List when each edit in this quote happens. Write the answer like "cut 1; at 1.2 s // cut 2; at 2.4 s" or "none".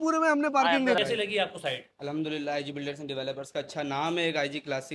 cut 1; at 1.0 s